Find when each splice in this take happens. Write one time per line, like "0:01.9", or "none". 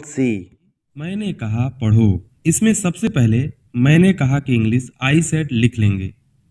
0:01.1